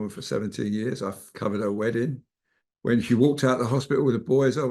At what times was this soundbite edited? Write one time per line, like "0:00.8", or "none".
0:01.3